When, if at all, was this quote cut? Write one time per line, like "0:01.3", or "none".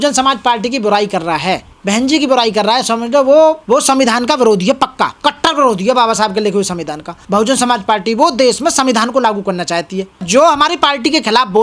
0:01.7
0:03.6
0:05.1
0:07.2
0:10.2